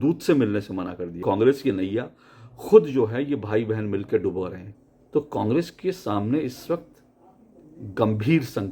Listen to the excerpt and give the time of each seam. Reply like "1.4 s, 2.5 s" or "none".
1.1 s, 4.6 s